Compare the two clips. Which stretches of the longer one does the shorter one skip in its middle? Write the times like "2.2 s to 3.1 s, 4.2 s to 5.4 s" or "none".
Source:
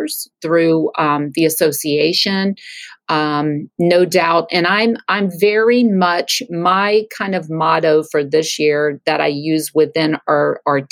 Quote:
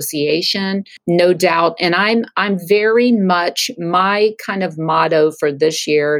2.7 s to 3.7 s